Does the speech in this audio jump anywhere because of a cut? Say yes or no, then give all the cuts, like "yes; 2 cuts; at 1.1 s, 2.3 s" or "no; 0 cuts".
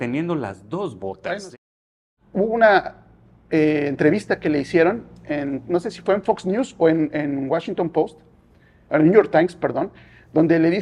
yes; 1 cut; at 2.0 s